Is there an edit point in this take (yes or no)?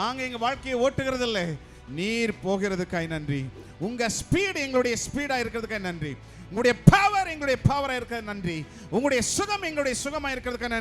no